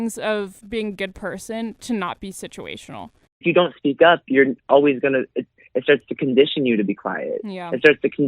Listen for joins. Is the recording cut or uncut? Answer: cut